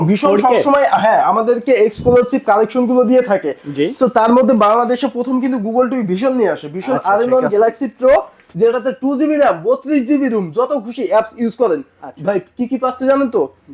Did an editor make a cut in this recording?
no; 0 cuts

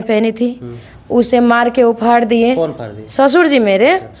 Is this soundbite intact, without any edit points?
yes; 0 cuts

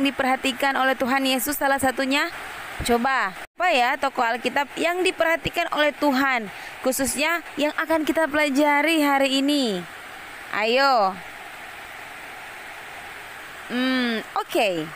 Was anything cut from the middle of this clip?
yes; 1 cut; at 3.5 s

